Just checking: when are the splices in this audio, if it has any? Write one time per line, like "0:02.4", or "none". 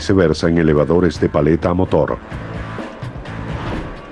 0:01.3